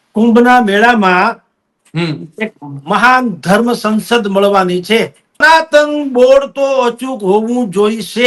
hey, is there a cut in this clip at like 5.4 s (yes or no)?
yes